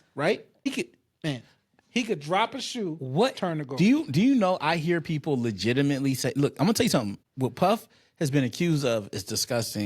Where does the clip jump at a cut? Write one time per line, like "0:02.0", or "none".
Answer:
0:00.7
0:07.2